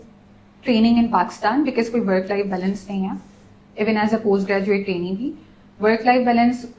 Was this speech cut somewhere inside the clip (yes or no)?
no